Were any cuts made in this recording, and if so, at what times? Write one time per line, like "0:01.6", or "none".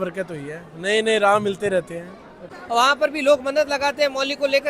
0:02.5